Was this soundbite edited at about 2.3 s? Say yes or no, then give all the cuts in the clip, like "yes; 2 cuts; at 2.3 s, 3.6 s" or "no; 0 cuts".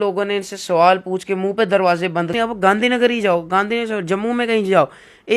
yes; 1 cut; at 2.3 s